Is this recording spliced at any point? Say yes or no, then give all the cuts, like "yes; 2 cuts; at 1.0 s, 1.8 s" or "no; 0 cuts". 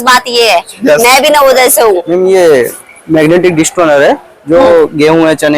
yes; 1 cut; at 2.0 s